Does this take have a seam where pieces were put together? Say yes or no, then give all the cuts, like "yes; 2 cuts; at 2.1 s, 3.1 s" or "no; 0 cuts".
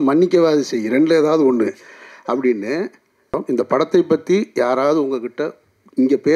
yes; 1 cut; at 3.4 s